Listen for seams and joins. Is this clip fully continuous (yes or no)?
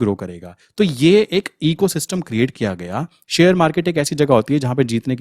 no